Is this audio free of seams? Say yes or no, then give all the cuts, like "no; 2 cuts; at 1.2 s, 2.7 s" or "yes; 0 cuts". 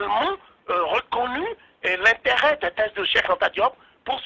no; 1 cut; at 2.2 s